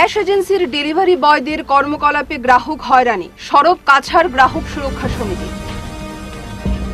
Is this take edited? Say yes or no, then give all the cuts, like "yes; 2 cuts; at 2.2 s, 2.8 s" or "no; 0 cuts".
no; 0 cuts